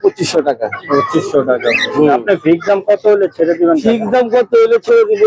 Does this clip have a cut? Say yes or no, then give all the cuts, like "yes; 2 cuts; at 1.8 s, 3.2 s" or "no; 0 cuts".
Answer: no; 0 cuts